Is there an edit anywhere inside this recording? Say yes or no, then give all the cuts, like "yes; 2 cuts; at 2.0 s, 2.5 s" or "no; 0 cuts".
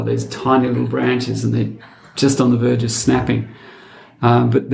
no; 0 cuts